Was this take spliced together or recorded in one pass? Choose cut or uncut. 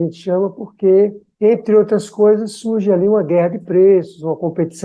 uncut